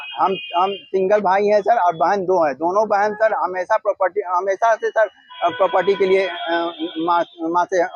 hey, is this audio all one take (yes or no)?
yes